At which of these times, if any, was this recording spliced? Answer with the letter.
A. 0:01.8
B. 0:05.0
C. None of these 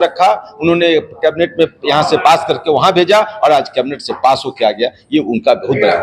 C